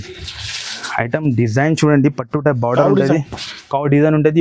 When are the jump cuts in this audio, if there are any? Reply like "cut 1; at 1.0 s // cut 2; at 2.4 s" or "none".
none